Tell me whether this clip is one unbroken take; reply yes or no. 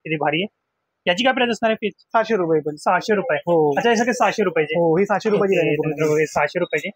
yes